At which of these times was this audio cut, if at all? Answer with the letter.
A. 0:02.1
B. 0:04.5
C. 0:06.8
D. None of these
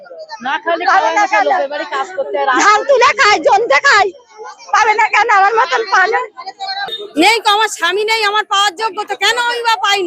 C